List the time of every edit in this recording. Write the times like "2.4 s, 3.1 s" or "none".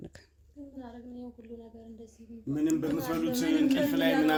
none